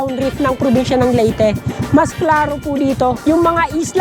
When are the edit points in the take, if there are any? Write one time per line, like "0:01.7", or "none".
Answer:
none